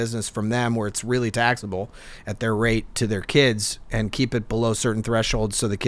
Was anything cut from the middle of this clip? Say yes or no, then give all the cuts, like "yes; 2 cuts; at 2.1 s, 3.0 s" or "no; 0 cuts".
no; 0 cuts